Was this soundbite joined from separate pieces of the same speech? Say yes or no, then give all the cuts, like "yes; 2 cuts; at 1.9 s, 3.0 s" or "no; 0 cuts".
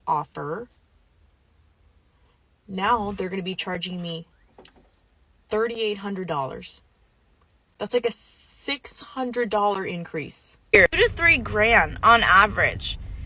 yes; 1 cut; at 10.7 s